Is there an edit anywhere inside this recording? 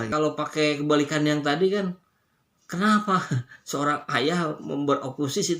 no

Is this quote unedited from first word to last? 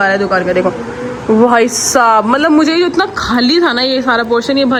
yes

